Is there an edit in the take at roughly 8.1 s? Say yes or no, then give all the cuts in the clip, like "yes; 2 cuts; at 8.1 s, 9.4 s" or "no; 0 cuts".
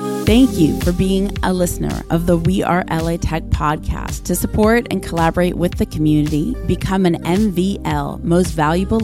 no; 0 cuts